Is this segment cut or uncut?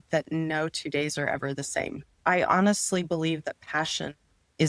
cut